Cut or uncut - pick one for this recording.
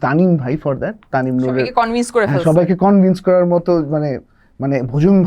uncut